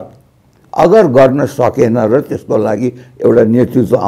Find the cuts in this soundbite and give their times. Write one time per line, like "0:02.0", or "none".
none